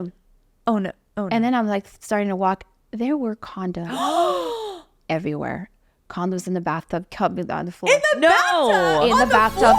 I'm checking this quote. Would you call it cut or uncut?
uncut